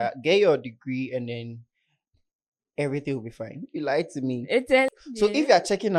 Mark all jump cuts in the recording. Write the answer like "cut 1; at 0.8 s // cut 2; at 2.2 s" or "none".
cut 1; at 4.9 s